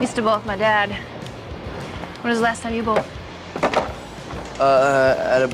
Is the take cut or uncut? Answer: uncut